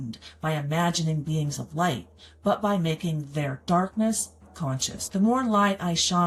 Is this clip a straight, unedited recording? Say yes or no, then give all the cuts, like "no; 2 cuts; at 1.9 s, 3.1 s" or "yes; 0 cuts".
yes; 0 cuts